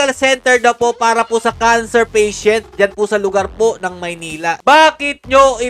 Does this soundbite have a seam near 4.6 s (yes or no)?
yes